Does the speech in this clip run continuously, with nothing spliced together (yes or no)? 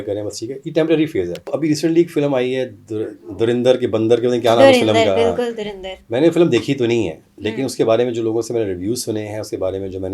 no